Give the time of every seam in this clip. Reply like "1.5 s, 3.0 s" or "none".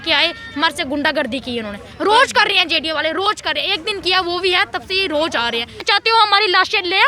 5.8 s